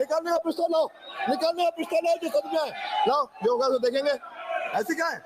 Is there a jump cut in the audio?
no; 0 cuts

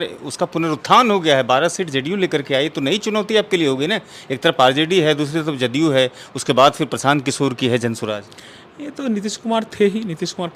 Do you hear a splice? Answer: no; 0 cuts

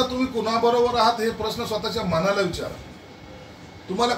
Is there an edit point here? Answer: no; 0 cuts

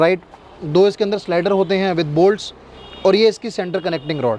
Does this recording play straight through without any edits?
yes; 0 cuts

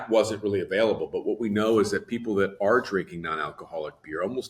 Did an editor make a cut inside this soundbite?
no; 0 cuts

